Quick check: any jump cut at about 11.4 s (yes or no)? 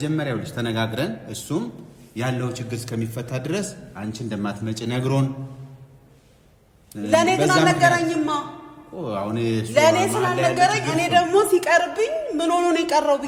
no